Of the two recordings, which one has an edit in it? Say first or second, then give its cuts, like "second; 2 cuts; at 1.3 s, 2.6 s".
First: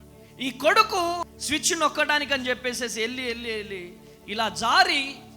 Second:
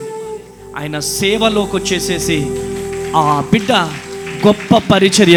first; 1 cut; at 1.3 s